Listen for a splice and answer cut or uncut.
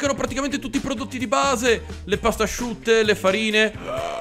uncut